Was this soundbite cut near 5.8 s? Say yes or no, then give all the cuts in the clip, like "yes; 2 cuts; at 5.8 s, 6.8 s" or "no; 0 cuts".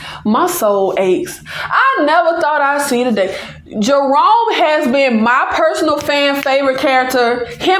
no; 0 cuts